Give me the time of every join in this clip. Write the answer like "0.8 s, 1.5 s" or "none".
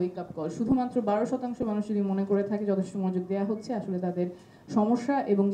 none